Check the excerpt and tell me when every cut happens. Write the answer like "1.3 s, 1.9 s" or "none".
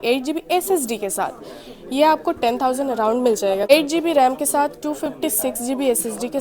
3.7 s